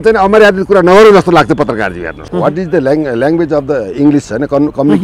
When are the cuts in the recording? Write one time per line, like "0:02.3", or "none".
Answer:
0:02.2